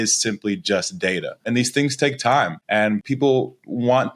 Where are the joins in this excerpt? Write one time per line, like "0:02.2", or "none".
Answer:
0:01.5
0:02.9